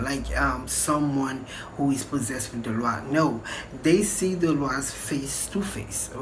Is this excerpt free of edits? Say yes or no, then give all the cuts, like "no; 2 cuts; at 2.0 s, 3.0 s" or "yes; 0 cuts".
yes; 0 cuts